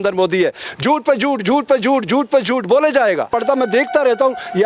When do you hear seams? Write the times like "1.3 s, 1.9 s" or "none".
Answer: 3.3 s